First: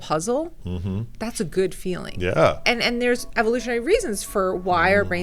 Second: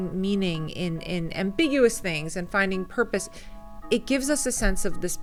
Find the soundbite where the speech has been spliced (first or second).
first